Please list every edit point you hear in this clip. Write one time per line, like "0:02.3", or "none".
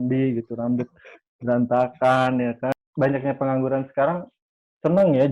0:02.7